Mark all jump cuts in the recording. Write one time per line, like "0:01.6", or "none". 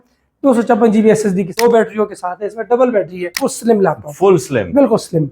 0:01.5
0:03.5